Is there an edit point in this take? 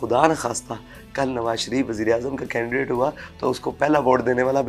no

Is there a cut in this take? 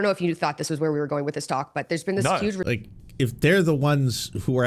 yes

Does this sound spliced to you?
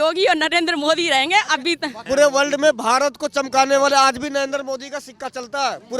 yes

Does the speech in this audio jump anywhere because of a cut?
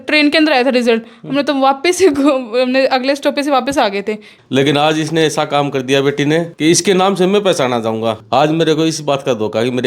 yes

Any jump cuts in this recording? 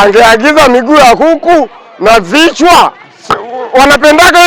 no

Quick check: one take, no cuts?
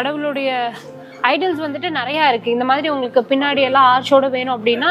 yes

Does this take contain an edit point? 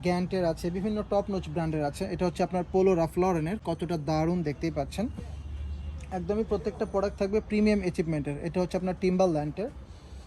no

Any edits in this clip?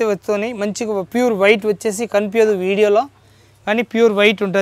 no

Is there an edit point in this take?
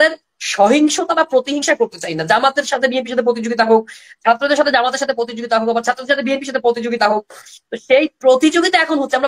no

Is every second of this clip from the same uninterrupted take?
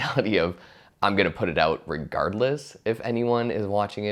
yes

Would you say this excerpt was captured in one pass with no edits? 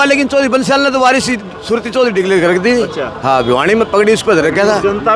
yes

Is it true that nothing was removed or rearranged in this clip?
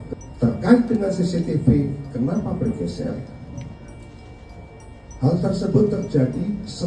yes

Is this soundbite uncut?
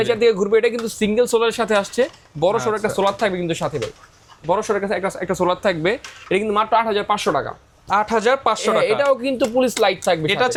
yes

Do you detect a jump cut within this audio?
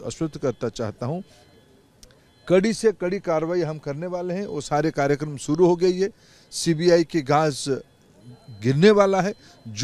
no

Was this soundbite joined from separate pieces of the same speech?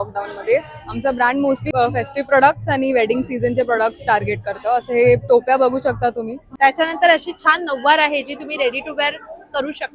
yes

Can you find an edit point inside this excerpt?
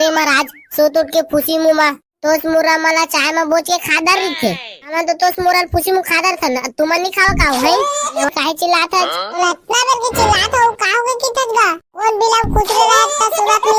yes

